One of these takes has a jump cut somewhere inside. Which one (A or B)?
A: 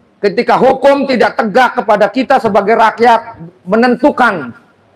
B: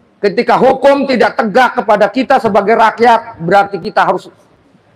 A